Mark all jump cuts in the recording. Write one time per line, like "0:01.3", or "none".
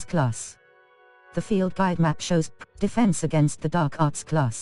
0:01.7
0:02.6